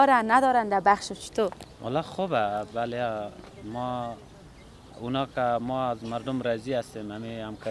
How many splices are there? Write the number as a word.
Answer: zero